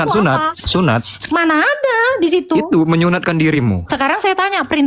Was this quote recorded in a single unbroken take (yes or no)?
yes